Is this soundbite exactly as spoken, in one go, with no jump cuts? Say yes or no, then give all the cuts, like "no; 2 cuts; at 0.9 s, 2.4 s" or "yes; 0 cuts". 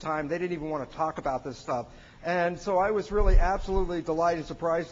no; 1 cut; at 1.2 s